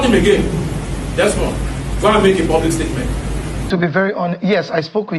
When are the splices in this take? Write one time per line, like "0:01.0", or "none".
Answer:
0:03.7